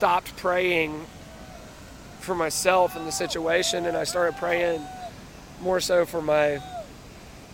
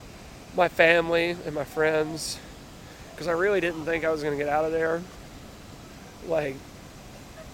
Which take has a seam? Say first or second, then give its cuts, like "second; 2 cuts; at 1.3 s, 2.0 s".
first; 1 cut; at 2.2 s